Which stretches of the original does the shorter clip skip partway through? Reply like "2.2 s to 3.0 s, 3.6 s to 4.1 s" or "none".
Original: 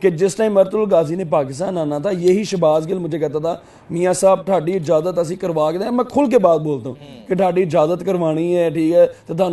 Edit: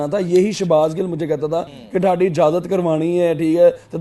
3.7 s to 7.1 s